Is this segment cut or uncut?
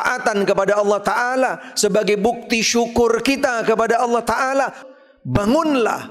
cut